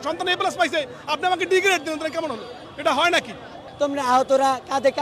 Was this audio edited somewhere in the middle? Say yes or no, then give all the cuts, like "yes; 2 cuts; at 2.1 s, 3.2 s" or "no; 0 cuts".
yes; 1 cut; at 3.6 s